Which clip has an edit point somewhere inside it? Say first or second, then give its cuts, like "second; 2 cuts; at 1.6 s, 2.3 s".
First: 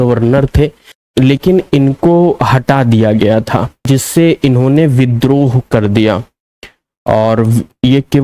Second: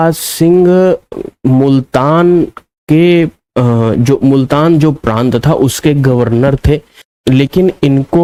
first; 1 cut; at 3.8 s